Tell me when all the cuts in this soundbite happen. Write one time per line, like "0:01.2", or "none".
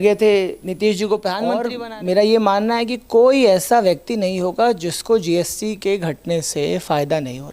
0:01.6